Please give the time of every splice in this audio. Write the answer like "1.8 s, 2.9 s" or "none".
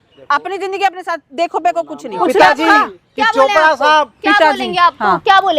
2.2 s